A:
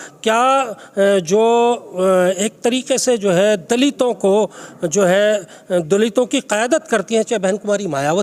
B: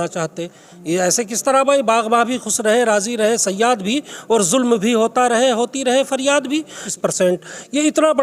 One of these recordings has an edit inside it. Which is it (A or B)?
B